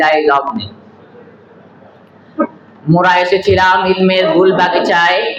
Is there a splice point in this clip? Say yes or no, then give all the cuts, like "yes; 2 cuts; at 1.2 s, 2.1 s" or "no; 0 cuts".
no; 0 cuts